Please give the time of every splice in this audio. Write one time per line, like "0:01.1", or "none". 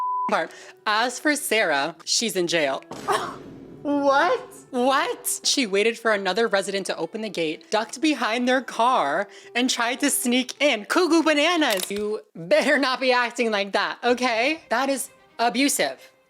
0:01.9
0:05.5
0:11.9